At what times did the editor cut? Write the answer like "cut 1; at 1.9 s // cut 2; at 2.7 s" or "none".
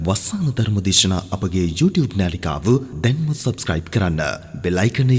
none